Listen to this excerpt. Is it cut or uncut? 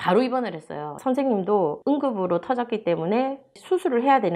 uncut